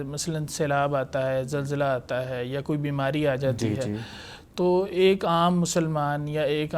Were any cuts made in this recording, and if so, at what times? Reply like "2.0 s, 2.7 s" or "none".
none